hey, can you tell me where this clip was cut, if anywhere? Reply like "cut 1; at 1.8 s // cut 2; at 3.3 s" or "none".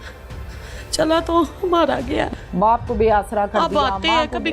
cut 1; at 2.3 s